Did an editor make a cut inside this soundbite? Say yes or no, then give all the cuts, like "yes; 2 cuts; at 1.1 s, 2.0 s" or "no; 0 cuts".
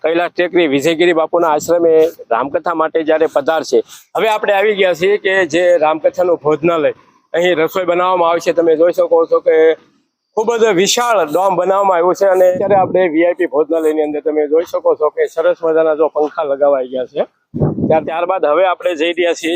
yes; 3 cuts; at 4.0 s, 12.5 s, 18.0 s